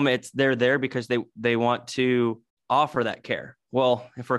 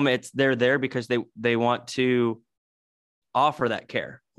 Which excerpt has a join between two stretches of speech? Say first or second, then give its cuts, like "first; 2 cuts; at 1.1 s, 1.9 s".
first; 1 cut; at 2.5 s